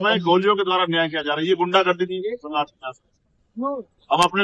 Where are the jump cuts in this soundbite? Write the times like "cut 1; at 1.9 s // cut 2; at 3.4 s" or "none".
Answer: none